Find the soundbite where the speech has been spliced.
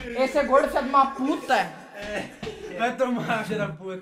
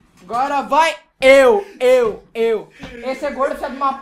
first; 1 cut; at 2.6 s

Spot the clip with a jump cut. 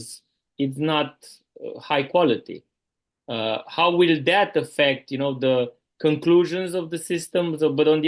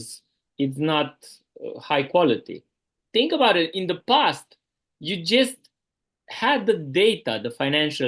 second; 1 cut; at 3.0 s

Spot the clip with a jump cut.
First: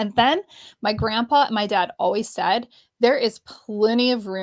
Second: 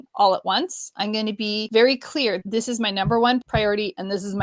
second; 3 cuts; at 1.6 s, 2.4 s, 3.4 s

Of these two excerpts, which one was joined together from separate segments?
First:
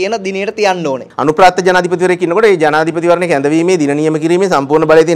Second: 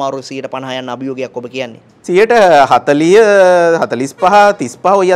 first; 1 cut; at 1.0 s

